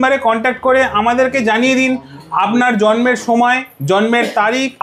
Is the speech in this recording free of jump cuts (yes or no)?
yes